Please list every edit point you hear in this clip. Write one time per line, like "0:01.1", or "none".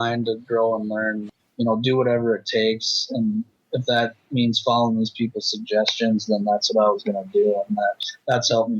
0:01.2
0:03.6